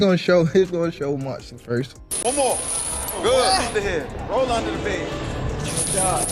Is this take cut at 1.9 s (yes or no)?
yes